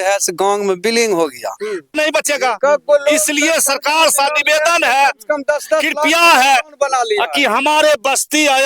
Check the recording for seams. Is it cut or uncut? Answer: cut